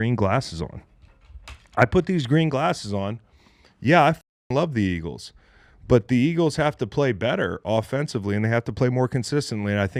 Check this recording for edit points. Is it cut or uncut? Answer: uncut